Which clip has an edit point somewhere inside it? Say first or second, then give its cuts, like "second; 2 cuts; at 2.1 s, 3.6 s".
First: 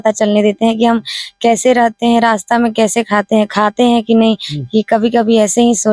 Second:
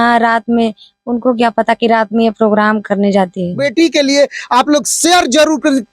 second; 1 cut; at 3.6 s